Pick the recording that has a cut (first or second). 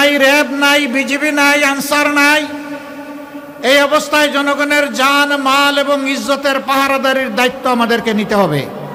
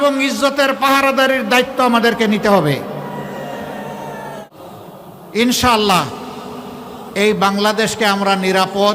second